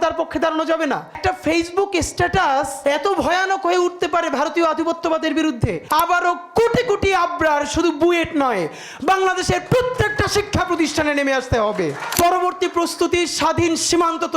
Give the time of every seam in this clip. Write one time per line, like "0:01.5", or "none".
0:01.2
0:02.7
0:05.8
0:12.1